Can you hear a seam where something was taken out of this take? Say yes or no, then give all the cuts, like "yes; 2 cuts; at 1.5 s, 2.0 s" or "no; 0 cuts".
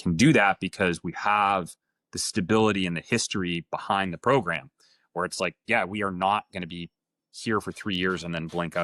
no; 0 cuts